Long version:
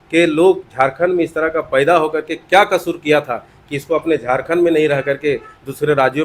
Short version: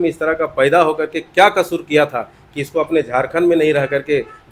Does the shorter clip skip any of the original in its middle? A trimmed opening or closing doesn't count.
no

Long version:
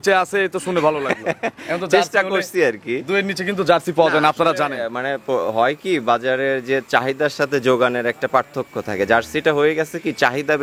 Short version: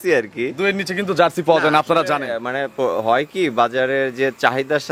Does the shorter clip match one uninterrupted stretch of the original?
yes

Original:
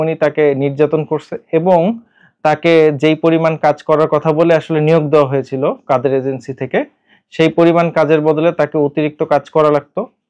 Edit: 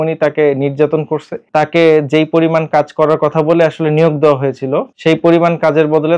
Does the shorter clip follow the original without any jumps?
no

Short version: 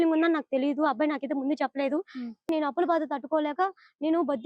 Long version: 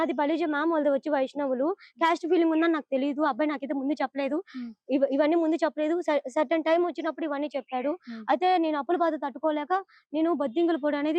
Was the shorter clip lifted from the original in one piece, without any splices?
no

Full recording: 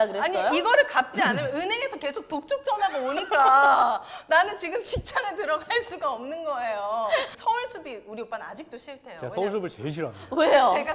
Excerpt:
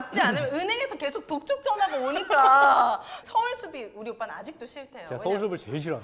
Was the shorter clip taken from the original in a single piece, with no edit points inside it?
no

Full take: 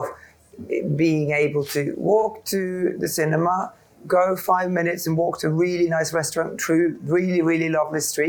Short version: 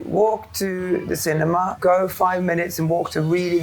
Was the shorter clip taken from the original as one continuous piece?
no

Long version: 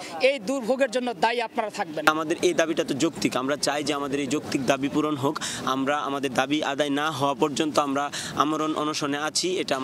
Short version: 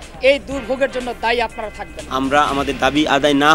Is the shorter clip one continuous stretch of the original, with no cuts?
no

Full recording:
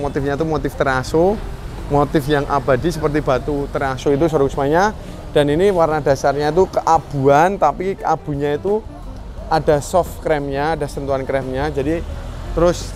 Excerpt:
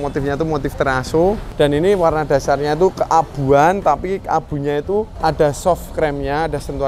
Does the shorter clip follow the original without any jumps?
no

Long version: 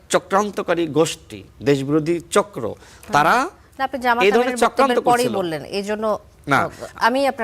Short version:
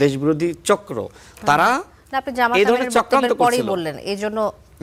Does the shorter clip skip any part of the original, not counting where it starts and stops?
no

